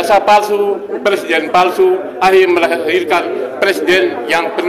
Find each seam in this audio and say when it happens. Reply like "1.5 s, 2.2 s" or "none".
none